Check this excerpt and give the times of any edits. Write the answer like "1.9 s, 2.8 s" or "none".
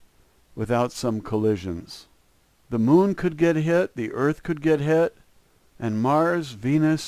5.8 s